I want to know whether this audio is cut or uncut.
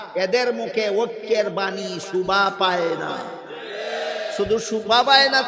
uncut